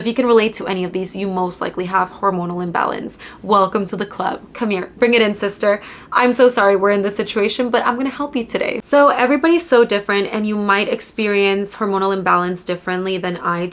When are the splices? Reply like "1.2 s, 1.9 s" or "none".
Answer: none